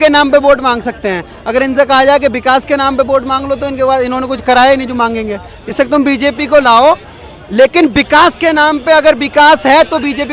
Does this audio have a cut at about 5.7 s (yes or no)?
yes